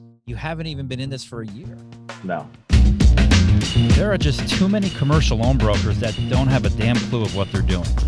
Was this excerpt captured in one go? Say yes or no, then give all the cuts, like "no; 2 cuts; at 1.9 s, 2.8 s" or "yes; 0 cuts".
no; 1 cut; at 2.7 s